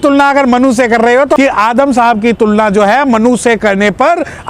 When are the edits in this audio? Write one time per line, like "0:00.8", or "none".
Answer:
0:01.4